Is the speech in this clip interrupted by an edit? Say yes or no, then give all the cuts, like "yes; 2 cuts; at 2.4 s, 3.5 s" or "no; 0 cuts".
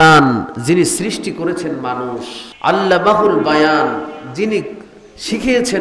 yes; 1 cut; at 2.4 s